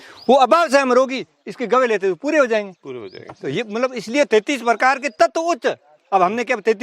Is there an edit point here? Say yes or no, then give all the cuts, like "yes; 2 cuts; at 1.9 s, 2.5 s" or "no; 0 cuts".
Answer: no; 0 cuts